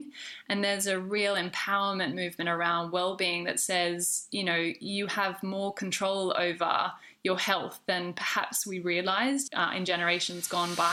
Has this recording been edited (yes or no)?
yes